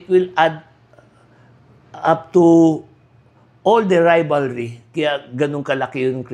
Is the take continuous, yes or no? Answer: yes